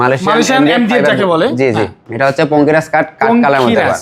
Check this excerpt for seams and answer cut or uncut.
cut